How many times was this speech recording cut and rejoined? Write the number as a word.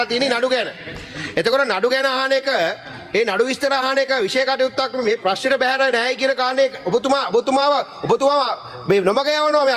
zero